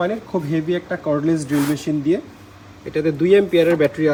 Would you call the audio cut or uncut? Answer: uncut